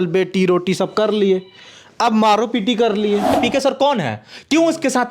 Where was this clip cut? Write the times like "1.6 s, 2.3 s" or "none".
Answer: 3.4 s